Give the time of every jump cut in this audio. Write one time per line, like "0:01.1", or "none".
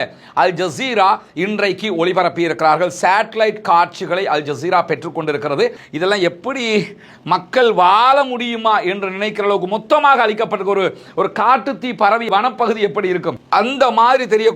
0:05.8